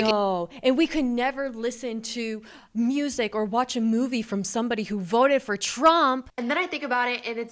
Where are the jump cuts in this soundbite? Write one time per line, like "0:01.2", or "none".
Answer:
0:06.3